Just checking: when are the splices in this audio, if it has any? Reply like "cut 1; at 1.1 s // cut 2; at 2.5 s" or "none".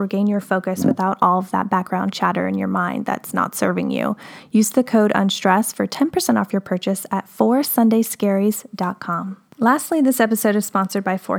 cut 1; at 9.4 s